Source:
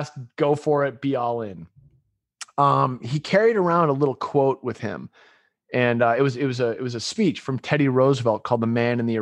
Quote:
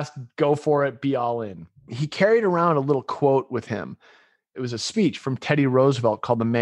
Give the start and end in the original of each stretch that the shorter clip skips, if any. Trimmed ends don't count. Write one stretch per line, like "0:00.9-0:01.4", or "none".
0:02.0-0:03.1
0:05.7-0:06.8